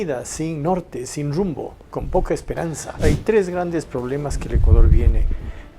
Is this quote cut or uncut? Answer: cut